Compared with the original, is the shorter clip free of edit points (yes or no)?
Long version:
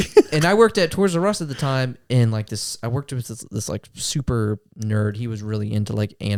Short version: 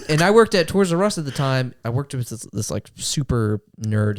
no